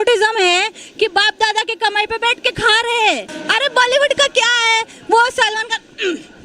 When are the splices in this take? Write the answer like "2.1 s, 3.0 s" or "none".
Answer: 3.3 s

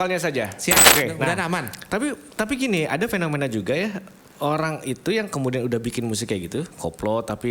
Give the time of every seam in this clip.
0.9 s

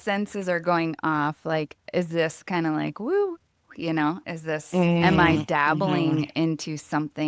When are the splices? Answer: none

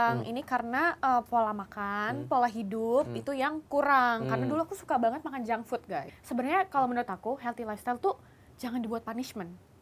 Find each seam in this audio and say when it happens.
6.0 s

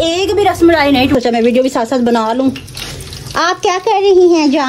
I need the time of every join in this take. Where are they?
1.1 s

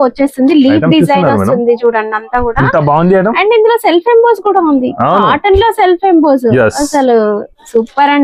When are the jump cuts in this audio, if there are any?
none

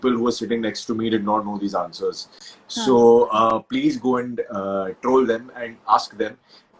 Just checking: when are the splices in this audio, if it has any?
none

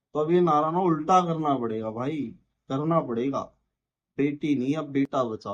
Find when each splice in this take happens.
none

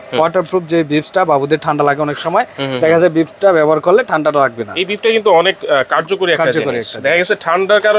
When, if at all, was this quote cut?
none

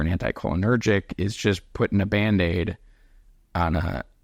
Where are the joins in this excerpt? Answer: none

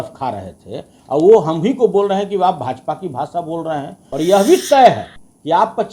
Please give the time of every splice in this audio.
4.0 s

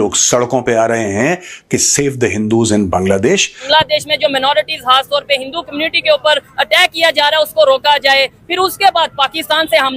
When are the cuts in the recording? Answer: 3.6 s

